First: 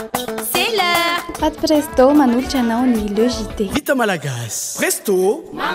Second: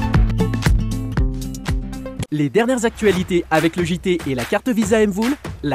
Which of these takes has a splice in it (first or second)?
second